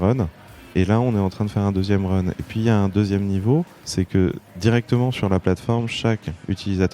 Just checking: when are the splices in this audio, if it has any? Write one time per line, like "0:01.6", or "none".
0:04.2